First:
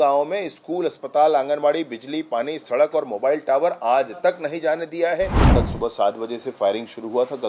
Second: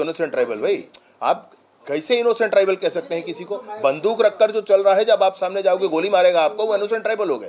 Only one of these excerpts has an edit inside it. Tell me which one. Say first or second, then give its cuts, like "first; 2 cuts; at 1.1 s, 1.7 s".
first; 1 cut; at 5.4 s